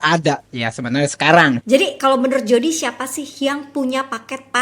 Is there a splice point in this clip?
yes; 1 cut; at 1.6 s

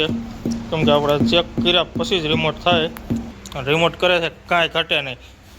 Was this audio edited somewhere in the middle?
yes; 1 cut; at 3.3 s

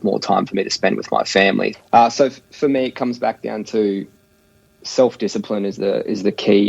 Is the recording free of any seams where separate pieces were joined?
no; 1 cut; at 1.7 s

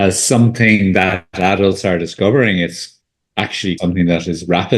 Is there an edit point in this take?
yes; 1 cut; at 3.8 s

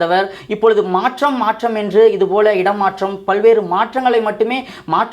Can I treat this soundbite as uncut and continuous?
yes; 0 cuts

